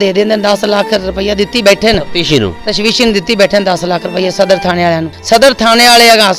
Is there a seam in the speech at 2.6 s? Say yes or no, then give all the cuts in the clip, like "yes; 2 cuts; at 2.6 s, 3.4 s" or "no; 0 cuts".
no; 1 cut; at 5.1 s